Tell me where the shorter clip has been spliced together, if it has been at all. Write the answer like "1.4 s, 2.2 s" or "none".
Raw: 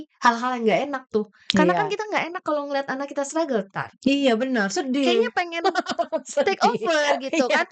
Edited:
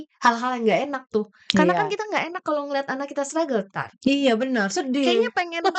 none